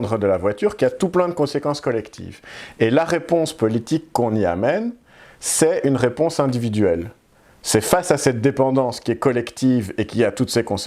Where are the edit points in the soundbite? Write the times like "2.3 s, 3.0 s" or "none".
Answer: none